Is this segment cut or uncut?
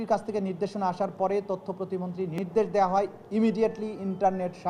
cut